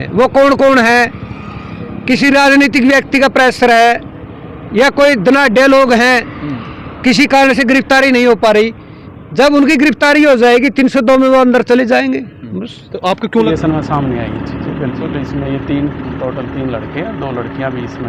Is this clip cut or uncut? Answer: cut